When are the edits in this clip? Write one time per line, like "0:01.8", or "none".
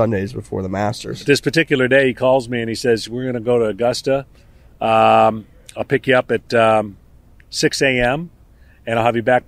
0:01.2